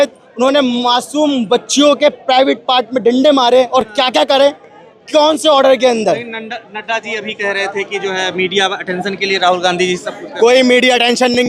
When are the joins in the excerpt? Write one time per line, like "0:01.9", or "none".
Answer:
none

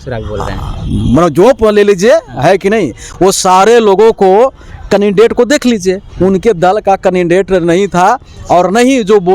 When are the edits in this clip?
none

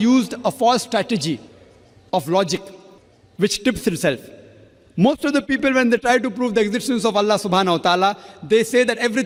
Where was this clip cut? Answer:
none

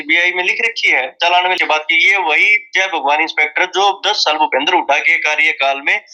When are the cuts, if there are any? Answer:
0:01.6

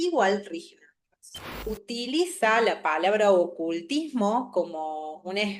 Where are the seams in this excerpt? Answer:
0:01.6

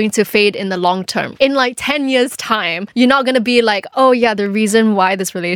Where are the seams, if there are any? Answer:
0:01.3
0:02.8

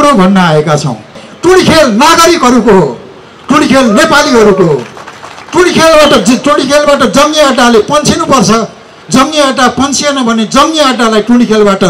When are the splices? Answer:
0:01.3

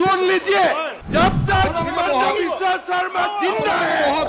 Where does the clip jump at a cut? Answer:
0:00.9

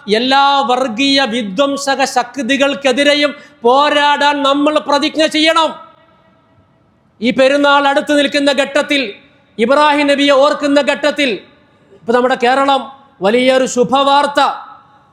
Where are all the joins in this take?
none

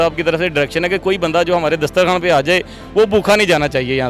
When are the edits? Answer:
none

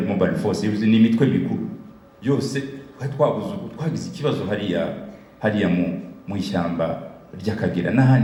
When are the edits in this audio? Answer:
none

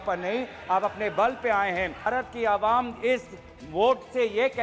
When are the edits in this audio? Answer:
0:02.1

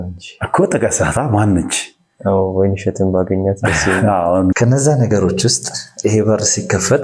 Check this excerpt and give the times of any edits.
0:04.5

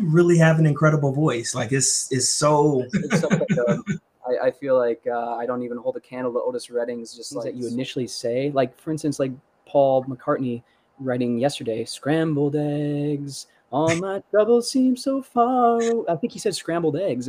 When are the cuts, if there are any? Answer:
0:03.0
0:07.5

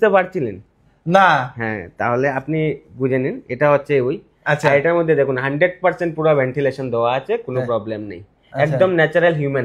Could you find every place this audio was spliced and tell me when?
none

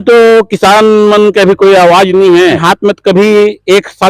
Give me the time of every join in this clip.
0:02.6

